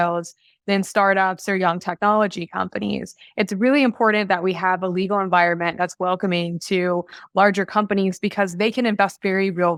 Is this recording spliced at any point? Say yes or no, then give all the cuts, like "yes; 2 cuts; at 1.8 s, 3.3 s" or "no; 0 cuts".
no; 0 cuts